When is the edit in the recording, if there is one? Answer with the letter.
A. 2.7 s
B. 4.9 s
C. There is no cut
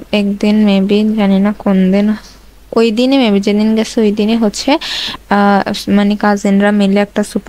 C